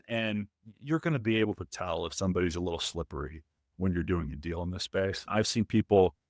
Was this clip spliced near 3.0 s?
no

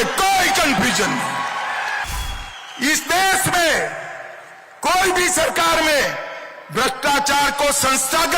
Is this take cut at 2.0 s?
yes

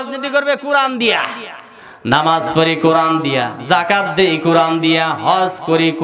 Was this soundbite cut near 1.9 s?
no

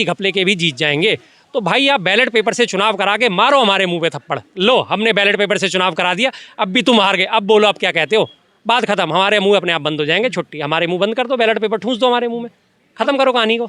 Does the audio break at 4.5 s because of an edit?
no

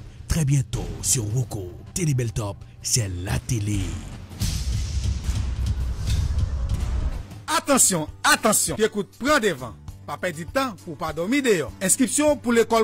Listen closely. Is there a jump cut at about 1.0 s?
no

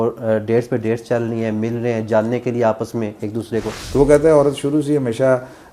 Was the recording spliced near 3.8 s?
yes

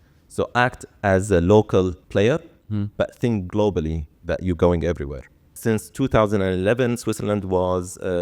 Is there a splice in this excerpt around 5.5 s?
yes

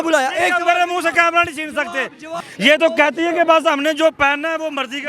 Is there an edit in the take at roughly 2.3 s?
yes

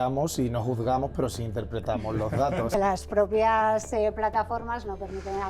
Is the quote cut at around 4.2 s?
no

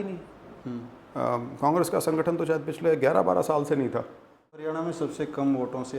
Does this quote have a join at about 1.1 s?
no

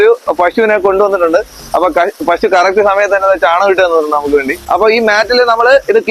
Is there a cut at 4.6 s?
yes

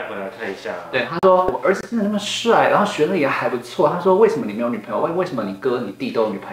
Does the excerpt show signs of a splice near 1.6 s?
yes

